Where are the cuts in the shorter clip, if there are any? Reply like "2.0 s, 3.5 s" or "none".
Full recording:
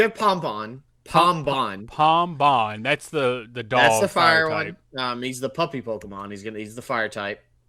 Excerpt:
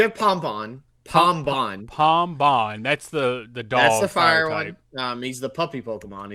none